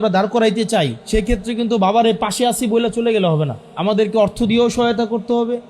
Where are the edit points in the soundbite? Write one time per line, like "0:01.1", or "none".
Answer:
0:01.0
0:03.6